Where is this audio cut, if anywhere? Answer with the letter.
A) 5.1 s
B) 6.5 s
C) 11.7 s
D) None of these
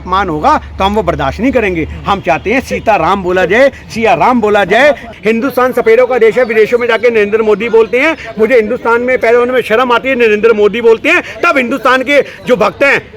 A